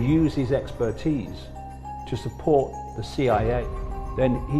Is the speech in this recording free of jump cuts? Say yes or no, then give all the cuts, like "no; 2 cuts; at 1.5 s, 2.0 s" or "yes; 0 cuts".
no; 1 cut; at 3.6 s